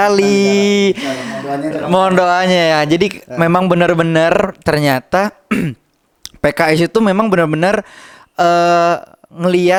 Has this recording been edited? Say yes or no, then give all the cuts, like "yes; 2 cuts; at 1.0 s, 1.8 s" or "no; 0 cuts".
no; 0 cuts